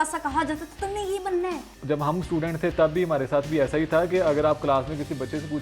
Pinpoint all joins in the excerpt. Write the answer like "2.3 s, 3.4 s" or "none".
1.7 s